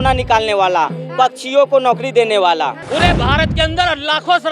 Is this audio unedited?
no; 1 cut; at 2.8 s

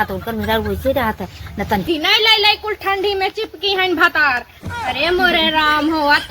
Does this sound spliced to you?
yes; 1 cut; at 1.9 s

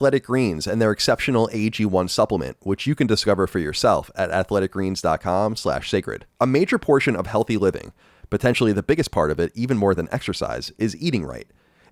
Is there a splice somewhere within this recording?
no; 0 cuts

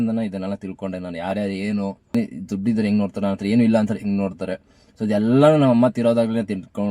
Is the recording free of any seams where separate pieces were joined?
no; 1 cut; at 2.1 s

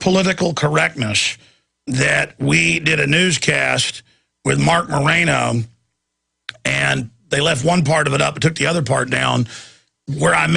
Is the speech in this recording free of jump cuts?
no; 1 cut; at 5.7 s

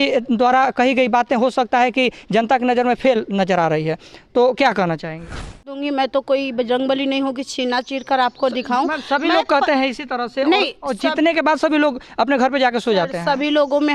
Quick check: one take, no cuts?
no; 1 cut; at 5.7 s

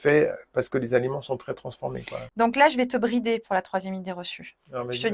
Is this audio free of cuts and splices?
yes; 0 cuts

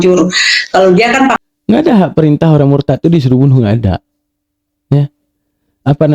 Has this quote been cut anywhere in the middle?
yes; 1 cut; at 1.4 s

